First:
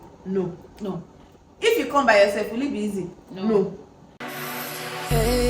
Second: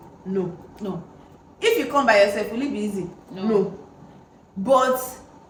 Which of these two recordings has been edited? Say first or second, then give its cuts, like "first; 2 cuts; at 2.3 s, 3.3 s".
first; 1 cut; at 4.4 s